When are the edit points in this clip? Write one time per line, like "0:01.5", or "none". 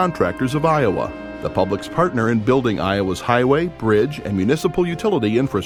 none